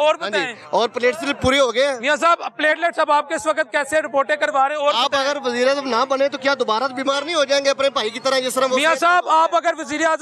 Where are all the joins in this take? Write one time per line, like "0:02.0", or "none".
none